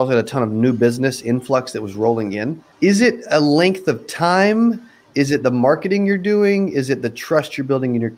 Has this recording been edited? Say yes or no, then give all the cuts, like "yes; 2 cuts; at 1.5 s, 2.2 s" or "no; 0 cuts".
yes; 1 cut; at 2.6 s